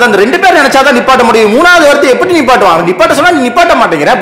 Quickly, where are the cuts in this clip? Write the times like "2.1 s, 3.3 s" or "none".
none